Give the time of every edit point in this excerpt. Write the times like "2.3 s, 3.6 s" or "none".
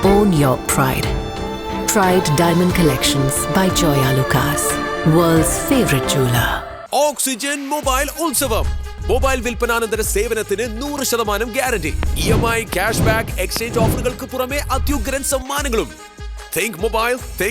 none

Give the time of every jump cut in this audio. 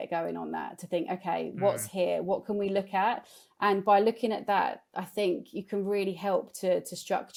none

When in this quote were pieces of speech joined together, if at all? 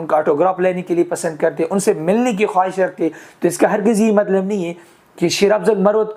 none

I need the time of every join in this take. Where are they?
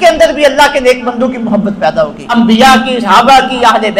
2.2 s, 3.0 s

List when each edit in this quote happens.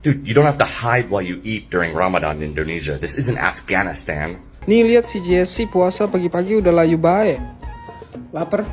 4.5 s

